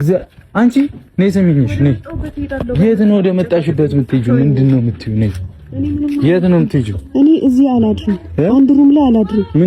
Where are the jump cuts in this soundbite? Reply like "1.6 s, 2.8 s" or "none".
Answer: none